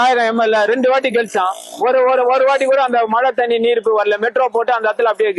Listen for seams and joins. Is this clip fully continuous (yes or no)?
yes